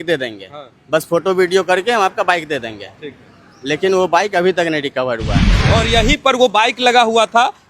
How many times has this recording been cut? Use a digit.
1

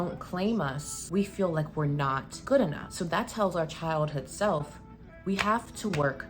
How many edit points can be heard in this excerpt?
3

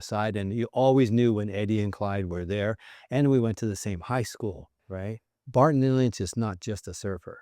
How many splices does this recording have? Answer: 1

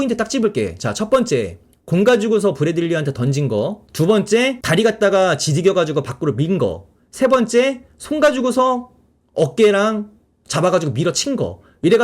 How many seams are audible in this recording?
2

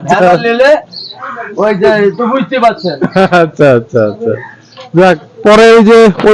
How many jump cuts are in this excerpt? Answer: 0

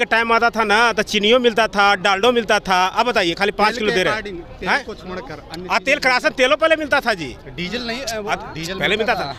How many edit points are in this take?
0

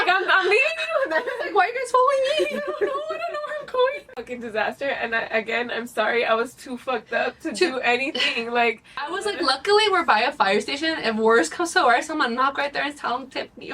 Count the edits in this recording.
2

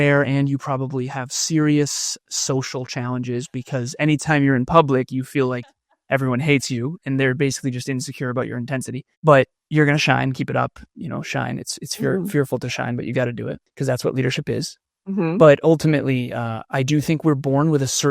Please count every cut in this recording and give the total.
2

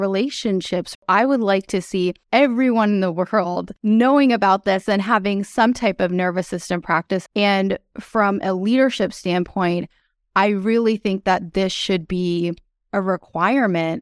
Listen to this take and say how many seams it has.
4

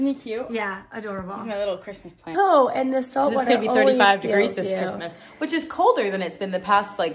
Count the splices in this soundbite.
1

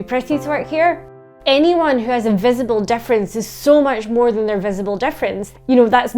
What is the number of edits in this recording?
1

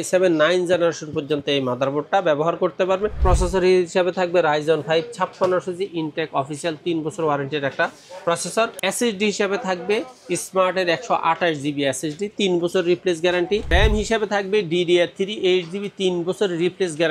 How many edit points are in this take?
3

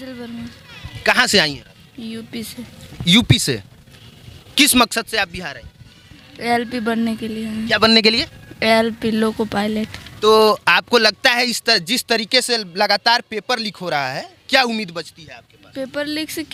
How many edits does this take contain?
0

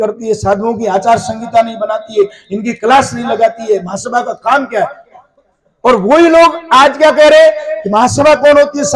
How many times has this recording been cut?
0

